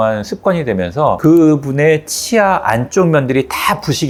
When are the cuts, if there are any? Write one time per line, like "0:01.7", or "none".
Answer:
none